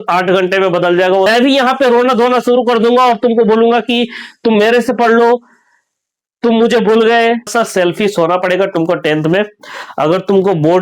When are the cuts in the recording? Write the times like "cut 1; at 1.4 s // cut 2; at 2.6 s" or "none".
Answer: cut 1; at 1.3 s // cut 2; at 7.5 s